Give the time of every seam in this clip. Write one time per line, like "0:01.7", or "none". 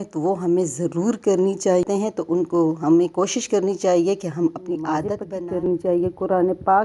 0:01.8
0:05.2